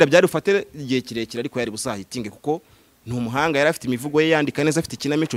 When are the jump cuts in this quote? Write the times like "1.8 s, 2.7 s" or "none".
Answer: none